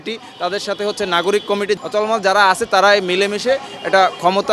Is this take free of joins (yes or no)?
no